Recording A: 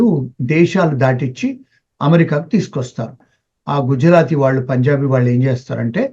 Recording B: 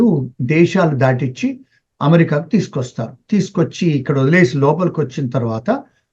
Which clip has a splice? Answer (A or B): A